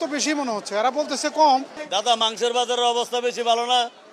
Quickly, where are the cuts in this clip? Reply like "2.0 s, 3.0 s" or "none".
1.8 s